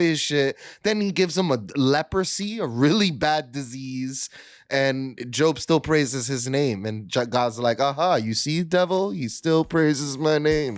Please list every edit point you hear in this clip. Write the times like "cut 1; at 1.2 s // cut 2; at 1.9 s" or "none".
none